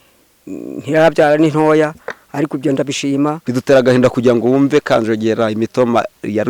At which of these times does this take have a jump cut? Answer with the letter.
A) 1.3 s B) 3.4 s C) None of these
B